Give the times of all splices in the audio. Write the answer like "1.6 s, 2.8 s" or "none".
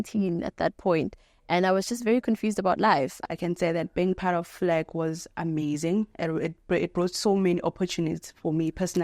3.2 s